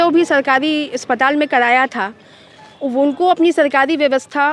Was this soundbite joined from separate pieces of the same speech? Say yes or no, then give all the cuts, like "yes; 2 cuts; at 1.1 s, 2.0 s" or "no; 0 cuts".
no; 0 cuts